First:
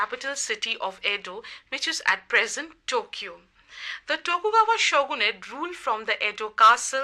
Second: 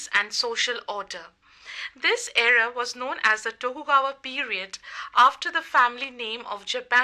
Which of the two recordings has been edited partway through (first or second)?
second